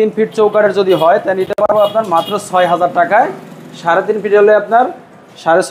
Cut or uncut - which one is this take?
uncut